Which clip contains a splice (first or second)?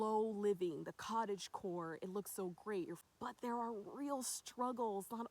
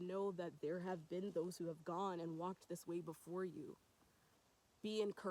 first